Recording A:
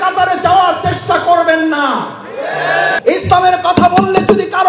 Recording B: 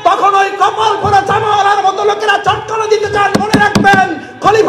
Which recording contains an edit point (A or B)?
A